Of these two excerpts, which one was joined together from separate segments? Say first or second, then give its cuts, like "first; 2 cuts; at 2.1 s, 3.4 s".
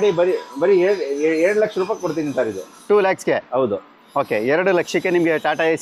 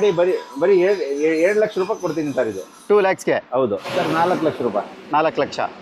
second; 1 cut; at 3.8 s